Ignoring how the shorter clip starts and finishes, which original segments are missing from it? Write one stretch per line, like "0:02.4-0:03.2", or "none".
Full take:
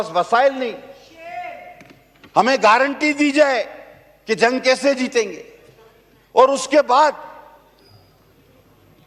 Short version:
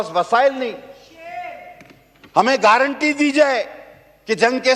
none